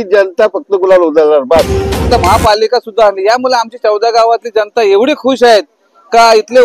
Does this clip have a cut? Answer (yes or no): yes